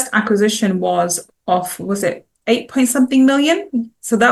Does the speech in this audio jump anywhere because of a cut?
no; 0 cuts

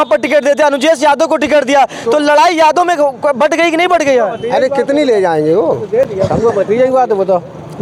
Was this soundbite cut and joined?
no; 0 cuts

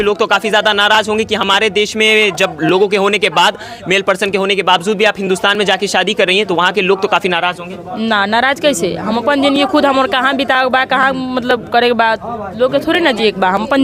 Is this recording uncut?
yes; 0 cuts

